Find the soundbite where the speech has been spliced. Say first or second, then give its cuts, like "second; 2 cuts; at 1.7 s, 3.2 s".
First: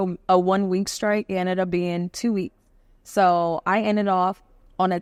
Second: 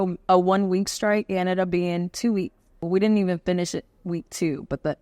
second; 1 cut; at 2.8 s